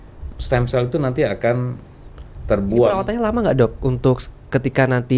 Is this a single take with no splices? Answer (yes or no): no